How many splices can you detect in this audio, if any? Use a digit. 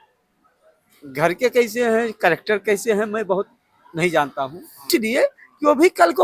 1